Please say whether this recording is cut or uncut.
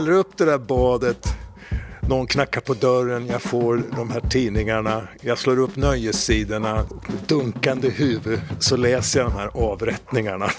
cut